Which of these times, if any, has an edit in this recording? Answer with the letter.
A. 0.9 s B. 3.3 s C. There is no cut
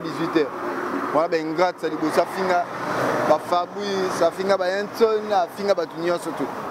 C